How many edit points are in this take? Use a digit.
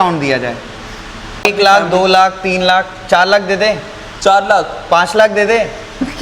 1